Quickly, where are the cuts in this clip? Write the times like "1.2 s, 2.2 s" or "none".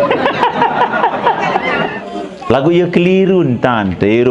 2.0 s